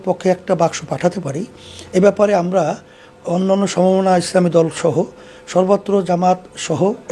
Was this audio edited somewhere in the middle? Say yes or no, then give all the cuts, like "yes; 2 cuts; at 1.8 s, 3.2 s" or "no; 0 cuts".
no; 0 cuts